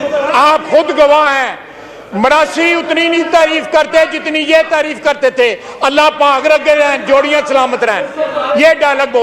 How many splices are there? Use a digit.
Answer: 0